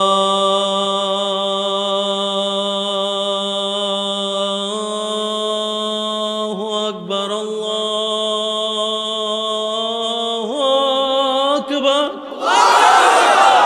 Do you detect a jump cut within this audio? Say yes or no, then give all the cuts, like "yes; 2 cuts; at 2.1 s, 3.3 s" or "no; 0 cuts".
no; 0 cuts